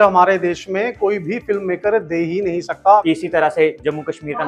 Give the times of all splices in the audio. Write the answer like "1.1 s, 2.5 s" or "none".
3.0 s